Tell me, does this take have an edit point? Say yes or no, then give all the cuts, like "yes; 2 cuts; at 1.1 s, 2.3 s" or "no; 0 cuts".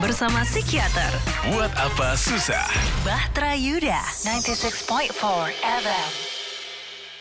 no; 0 cuts